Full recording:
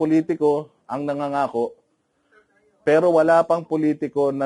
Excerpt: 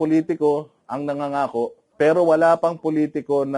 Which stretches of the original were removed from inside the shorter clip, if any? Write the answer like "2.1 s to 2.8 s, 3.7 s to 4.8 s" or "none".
1.8 s to 2.7 s